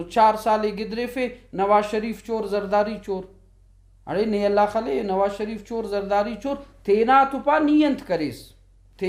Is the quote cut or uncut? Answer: uncut